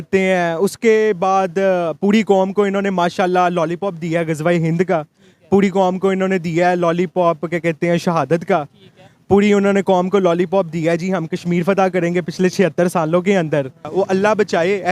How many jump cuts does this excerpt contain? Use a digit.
1